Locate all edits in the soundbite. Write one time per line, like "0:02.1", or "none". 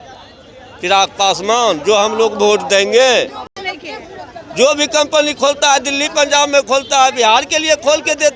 none